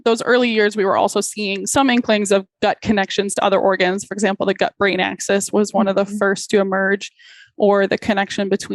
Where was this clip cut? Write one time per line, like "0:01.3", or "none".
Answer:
0:01.6